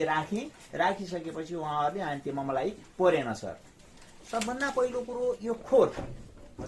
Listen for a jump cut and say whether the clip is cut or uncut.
cut